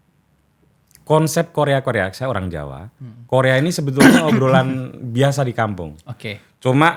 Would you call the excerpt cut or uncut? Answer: uncut